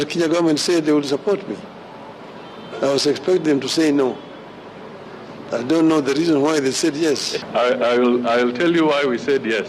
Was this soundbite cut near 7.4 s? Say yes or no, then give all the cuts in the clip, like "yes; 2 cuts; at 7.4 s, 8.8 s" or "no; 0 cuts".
yes; 1 cut; at 7.4 s